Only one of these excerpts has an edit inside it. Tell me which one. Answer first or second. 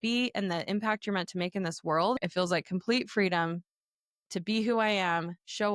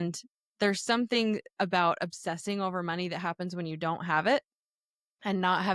first